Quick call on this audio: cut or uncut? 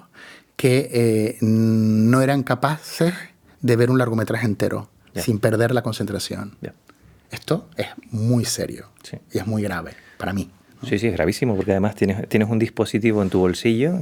uncut